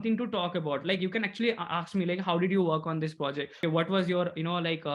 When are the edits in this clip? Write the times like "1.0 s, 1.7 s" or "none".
3.5 s